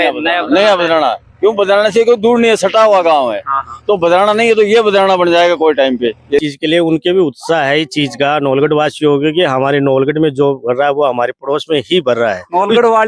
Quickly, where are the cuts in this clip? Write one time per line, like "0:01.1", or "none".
0:06.4